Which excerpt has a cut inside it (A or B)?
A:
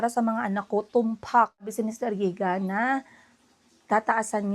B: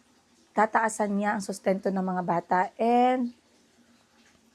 A